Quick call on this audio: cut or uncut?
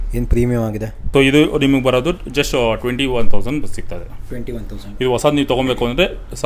cut